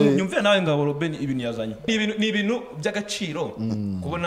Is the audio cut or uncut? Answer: cut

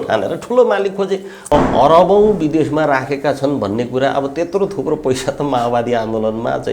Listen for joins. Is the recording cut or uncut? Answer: cut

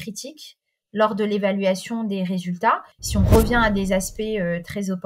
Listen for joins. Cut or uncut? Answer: cut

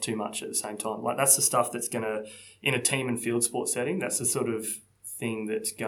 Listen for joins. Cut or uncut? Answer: uncut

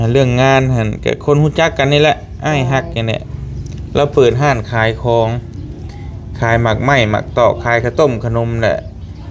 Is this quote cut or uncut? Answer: uncut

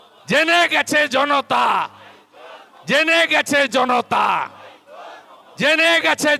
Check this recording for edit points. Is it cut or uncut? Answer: uncut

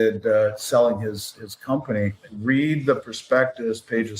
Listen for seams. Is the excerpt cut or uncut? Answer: cut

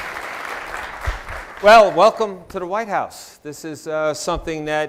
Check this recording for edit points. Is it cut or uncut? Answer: uncut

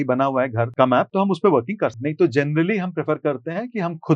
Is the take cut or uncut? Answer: cut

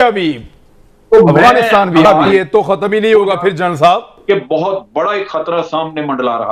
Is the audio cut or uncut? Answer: cut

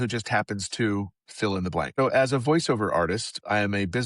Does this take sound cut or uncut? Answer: cut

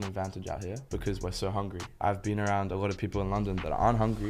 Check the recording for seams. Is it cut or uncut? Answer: cut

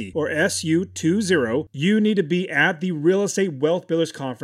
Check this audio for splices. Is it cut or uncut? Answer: cut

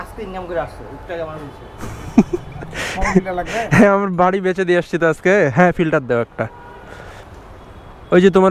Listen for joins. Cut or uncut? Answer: uncut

